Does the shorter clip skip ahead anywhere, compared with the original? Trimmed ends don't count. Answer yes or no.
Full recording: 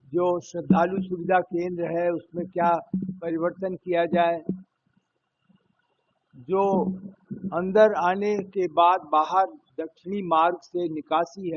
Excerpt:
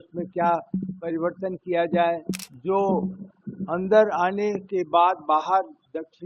yes